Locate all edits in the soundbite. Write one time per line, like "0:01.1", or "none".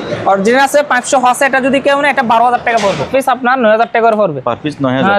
0:03.1